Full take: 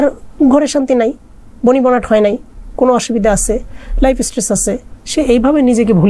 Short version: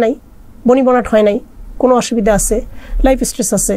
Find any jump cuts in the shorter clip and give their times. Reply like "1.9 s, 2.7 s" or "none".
none